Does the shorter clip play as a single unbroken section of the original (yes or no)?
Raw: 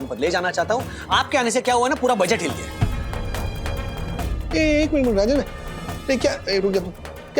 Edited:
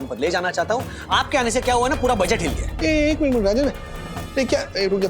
no